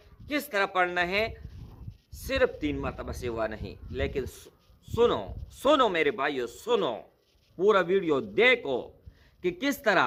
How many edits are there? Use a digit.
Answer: 0